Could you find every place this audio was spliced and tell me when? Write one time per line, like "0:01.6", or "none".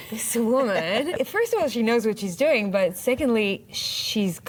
none